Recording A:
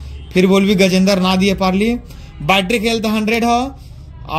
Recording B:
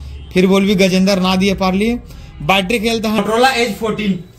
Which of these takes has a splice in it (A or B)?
B